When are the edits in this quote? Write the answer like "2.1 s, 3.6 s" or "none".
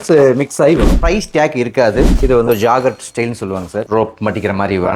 0.9 s, 2.1 s